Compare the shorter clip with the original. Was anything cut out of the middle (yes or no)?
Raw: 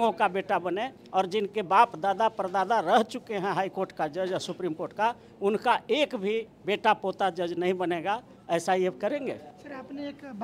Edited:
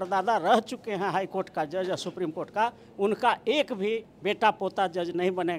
no